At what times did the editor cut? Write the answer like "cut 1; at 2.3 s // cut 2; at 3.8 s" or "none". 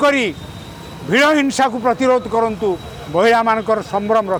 none